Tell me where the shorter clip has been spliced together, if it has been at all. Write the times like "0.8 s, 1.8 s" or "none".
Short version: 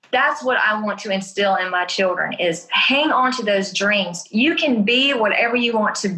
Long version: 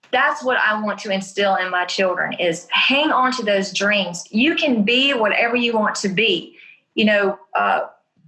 none